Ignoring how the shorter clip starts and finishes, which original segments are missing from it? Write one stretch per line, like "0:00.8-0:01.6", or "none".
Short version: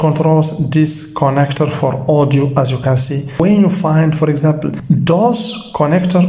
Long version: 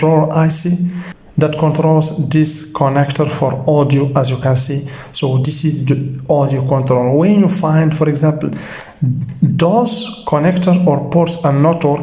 0:05.0-0:07.2
0:08.5-0:09.3